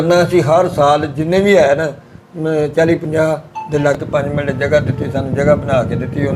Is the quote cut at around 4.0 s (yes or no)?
yes